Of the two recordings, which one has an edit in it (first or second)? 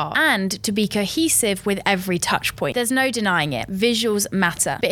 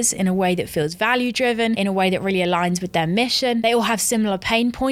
second